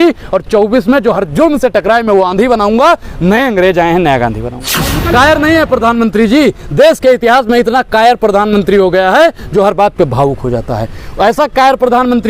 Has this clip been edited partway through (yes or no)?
yes